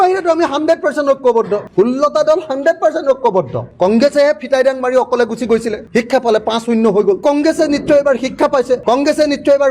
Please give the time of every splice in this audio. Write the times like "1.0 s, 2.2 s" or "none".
1.7 s, 3.7 s, 7.2 s